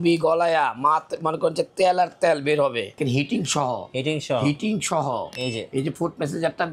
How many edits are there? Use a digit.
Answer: 1